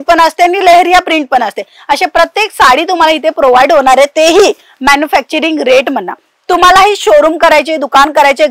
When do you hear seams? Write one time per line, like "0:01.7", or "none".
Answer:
none